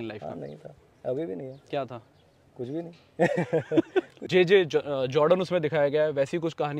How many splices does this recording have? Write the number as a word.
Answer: one